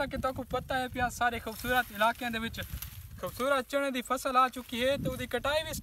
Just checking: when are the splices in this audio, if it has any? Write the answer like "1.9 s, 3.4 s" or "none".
none